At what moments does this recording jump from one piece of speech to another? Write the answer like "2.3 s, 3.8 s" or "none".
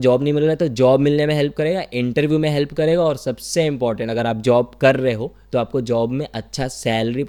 none